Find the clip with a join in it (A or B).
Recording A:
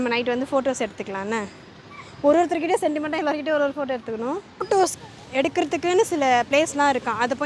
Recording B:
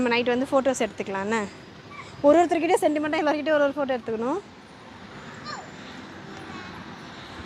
A